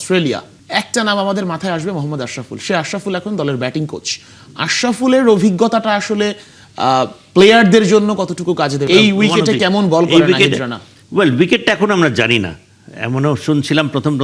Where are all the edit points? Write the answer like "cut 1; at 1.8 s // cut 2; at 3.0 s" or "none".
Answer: cut 1; at 8.8 s